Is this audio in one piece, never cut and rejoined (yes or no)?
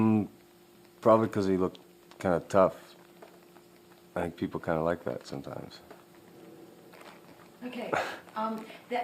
no